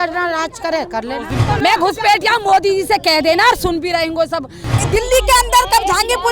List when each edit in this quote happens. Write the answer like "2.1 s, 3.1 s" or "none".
1.4 s, 4.8 s